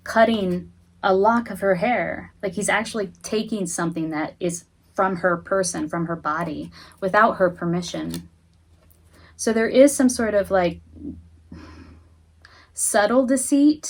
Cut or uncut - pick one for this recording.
uncut